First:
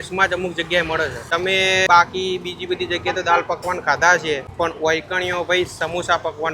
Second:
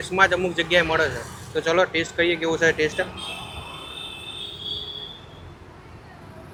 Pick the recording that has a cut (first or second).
first